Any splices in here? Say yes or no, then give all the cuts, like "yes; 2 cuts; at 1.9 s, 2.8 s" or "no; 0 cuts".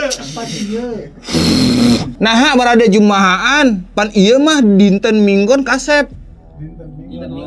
yes; 1 cut; at 2.1 s